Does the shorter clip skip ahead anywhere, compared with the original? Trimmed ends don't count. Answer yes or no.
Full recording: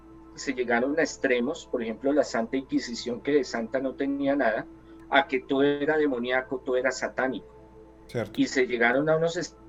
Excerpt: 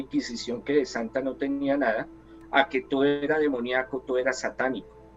no